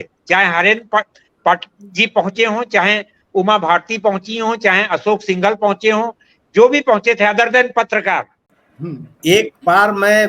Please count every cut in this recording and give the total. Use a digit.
1